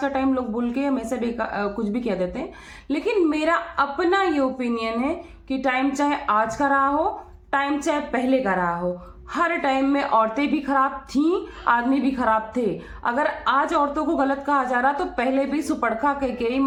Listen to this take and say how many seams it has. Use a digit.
0